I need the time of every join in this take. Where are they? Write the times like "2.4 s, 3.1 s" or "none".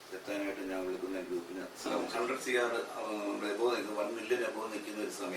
1.8 s